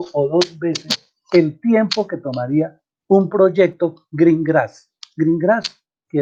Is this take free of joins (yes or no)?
yes